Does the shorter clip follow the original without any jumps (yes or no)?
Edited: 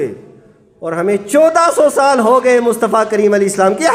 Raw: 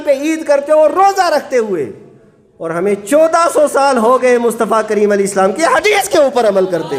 yes